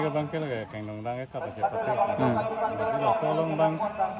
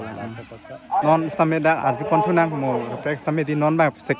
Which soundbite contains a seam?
second; 1 cut; at 1.0 s

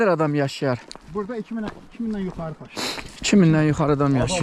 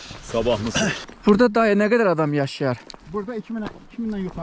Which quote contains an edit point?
second; 1 cut; at 1.0 s

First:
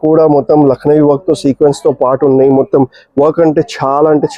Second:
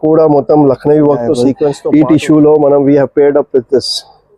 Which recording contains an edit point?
second; 1 cut; at 1.8 s

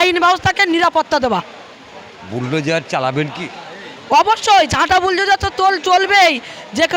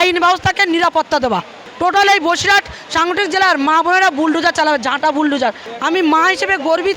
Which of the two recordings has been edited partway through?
second; 2 cuts; at 1.6 s, 5.6 s

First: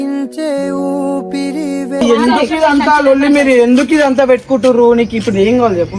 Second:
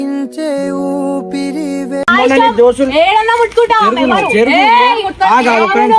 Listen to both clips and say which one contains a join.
first; 1 cut; at 2.0 s

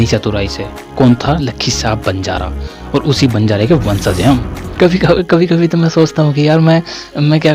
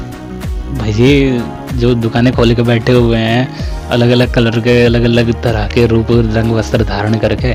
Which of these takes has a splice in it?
first; 1 cut; at 4.6 s

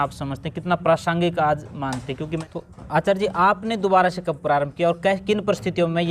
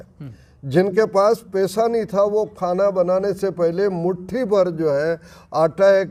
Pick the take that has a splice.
first; 1 cut; at 2.4 s

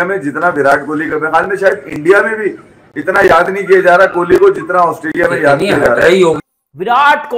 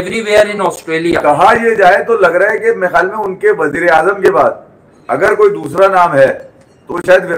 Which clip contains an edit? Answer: first; 1 cut; at 6.4 s

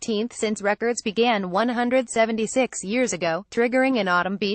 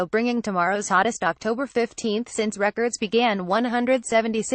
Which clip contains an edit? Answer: second; 1 cut; at 1.0 s

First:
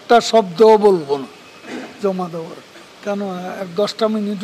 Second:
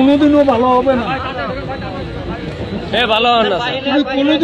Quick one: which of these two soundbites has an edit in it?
first; 1 cut; at 2.9 s

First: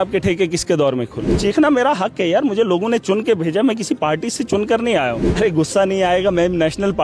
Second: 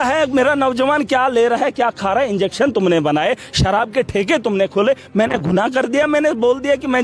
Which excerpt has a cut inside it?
first; 2 cuts; at 1.3 s, 5.2 s

